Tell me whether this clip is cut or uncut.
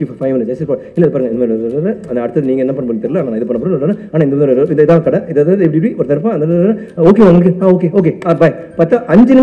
uncut